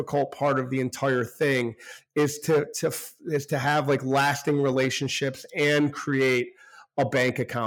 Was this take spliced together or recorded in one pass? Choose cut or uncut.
uncut